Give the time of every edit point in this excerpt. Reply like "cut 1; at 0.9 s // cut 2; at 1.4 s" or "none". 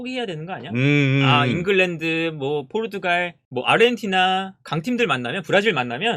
cut 1; at 3.4 s